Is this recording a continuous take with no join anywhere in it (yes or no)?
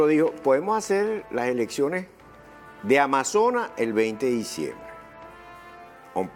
no